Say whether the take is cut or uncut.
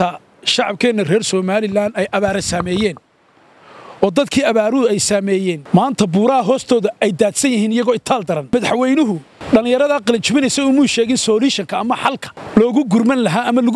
cut